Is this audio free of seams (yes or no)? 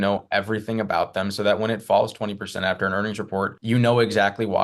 no